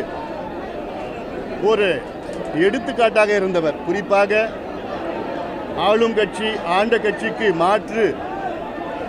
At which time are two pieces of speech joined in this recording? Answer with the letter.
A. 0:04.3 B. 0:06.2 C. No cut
C